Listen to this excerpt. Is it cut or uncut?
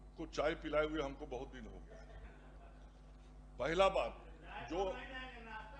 uncut